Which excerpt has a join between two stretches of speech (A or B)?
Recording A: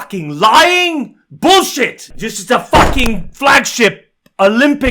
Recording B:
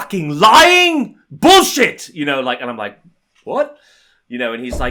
A